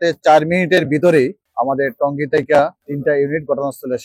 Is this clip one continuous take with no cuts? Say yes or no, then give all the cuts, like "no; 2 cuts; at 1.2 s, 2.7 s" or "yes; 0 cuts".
no; 2 cuts; at 1.4 s, 2.8 s